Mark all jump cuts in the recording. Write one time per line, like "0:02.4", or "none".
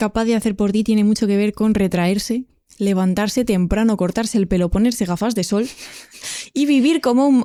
none